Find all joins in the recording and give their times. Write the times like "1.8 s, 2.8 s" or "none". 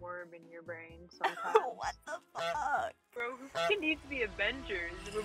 3.3 s